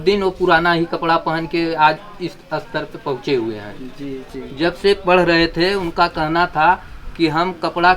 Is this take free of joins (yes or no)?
no